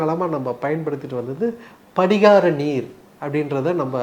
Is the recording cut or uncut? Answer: uncut